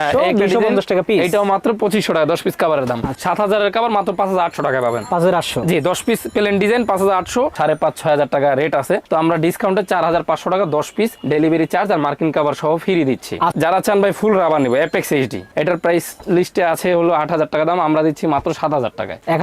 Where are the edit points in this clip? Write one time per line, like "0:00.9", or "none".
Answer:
0:03.1
0:07.5
0:13.5